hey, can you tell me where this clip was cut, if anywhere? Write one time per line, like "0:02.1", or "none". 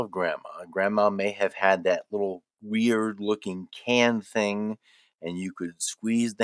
none